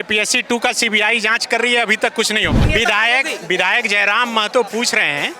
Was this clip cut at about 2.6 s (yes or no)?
yes